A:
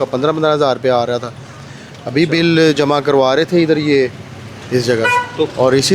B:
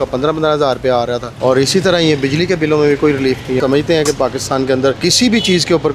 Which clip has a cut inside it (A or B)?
B